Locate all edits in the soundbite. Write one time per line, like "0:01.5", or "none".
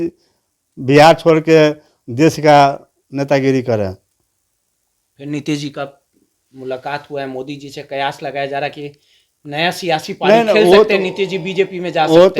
none